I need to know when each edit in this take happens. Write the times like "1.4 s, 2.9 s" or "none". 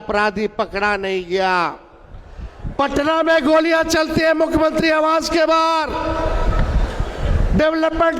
none